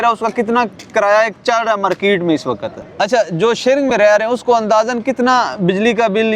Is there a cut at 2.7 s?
yes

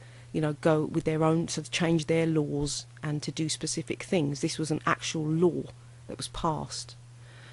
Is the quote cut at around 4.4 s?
yes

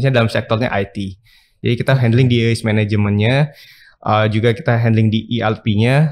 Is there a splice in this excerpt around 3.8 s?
no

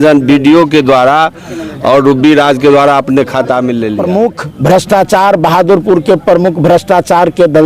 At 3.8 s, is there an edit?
yes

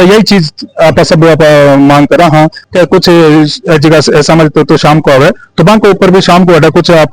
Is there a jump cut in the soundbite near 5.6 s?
no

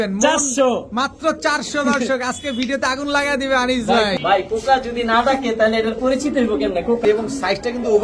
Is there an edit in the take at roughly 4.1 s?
yes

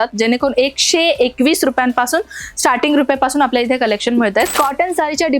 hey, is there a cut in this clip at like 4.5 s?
yes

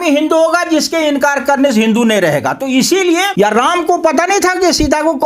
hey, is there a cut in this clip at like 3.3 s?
yes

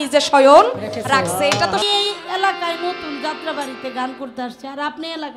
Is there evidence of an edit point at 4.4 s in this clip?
no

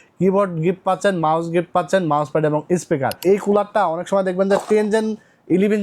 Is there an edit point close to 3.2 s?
yes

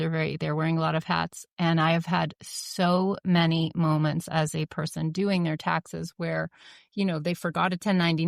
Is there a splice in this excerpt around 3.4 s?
no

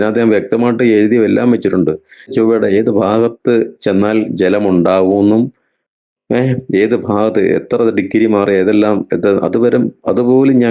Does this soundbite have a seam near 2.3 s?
yes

